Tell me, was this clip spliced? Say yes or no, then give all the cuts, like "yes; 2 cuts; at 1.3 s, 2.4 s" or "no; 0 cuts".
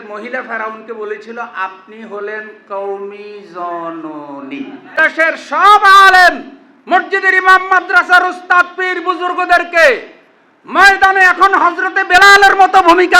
yes; 1 cut; at 5.0 s